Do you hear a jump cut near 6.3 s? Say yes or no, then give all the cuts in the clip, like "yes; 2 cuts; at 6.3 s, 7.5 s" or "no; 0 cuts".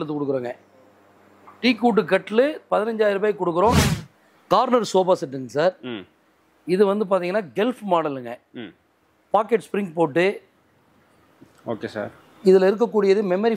no; 1 cut; at 3.8 s